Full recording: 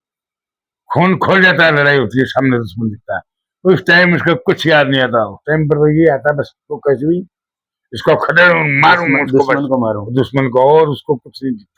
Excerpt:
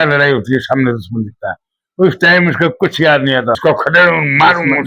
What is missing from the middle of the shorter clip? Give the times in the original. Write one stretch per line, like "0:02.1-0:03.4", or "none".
0:05.2-0:08.0